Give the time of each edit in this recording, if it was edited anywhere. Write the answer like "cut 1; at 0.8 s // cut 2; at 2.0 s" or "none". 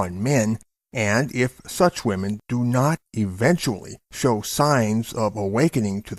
cut 1; at 2.4 s